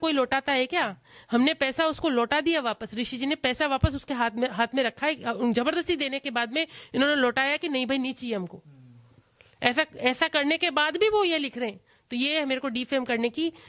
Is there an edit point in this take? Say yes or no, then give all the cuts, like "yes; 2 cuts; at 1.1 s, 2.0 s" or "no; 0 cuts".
no; 0 cuts